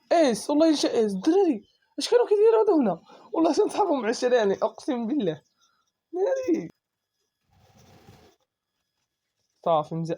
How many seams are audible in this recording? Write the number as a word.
one